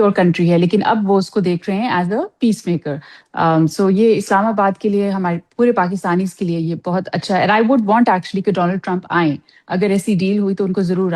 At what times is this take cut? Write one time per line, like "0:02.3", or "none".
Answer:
none